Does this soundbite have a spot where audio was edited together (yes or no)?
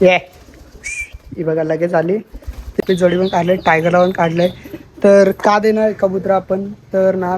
yes